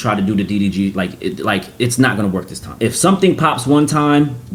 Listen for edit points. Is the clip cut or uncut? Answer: uncut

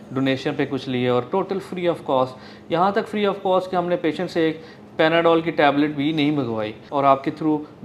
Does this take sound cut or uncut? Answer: cut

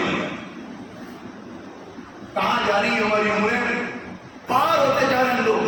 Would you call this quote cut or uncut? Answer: uncut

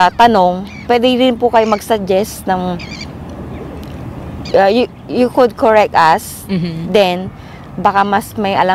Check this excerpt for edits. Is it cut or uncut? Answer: uncut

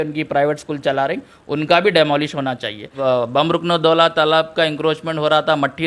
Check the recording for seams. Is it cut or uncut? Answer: cut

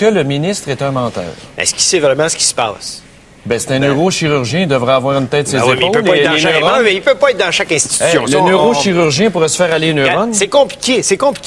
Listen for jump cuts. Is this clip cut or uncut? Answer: uncut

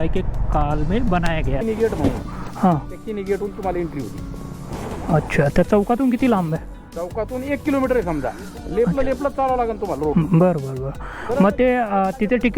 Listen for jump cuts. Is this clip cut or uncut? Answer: cut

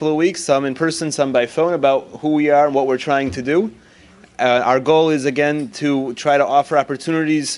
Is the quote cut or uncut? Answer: uncut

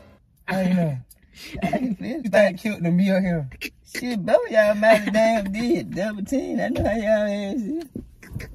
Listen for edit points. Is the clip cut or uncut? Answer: cut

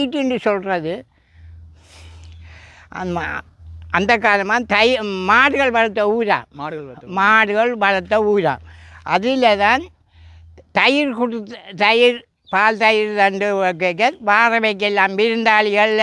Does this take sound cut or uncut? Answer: uncut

